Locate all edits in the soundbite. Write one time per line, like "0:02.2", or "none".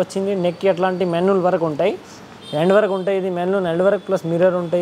none